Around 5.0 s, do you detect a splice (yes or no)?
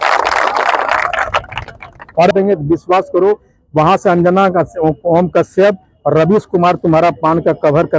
no